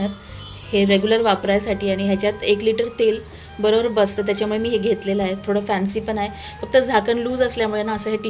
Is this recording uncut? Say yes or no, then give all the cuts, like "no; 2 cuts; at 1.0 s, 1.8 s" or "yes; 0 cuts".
yes; 0 cuts